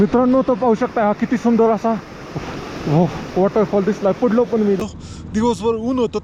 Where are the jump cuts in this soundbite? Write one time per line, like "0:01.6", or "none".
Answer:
0:04.8